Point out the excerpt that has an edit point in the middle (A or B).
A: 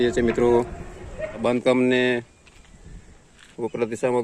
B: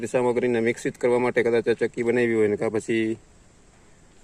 A